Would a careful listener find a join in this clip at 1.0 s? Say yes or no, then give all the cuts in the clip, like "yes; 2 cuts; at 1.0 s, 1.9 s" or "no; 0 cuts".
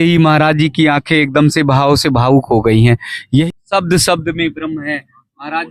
no; 1 cut; at 3.5 s